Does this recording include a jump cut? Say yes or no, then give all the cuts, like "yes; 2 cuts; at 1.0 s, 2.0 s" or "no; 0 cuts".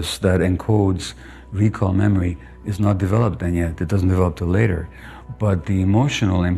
no; 0 cuts